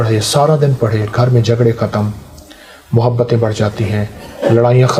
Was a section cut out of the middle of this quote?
no; 0 cuts

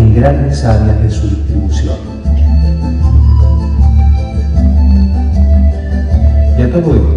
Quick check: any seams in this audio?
yes; 1 cut; at 3.0 s

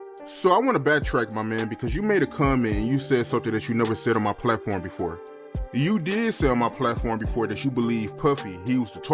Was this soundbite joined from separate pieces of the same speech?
no; 0 cuts

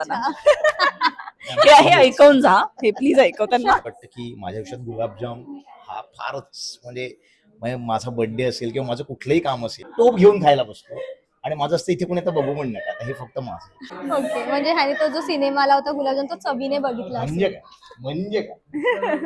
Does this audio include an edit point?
yes; 3 cuts; at 3.8 s, 9.9 s, 13.9 s

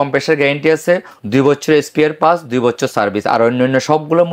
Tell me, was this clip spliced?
no; 0 cuts

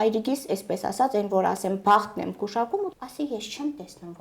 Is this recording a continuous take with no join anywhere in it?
no; 1 cut; at 2.9 s

